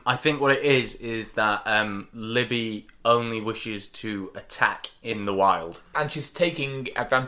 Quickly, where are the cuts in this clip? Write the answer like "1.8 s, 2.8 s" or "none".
5.9 s